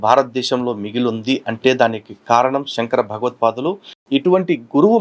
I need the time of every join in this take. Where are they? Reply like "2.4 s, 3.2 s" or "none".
3.9 s